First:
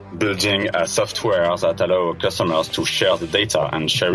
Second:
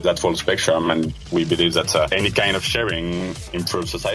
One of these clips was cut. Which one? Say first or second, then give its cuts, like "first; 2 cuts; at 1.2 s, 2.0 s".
second; 2 cuts; at 2.1 s, 3.3 s